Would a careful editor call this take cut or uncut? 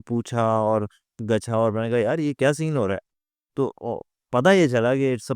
uncut